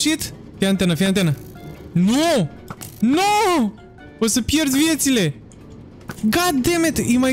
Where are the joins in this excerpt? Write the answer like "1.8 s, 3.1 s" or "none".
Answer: none